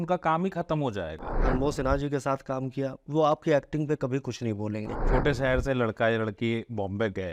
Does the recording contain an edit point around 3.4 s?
no; 2 cuts; at 1.3 s, 4.9 s

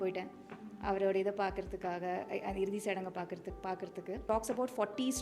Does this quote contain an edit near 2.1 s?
no; 1 cut; at 4.2 s

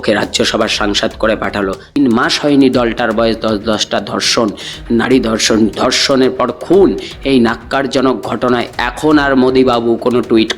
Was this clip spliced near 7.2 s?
no; 1 cut; at 2.0 s

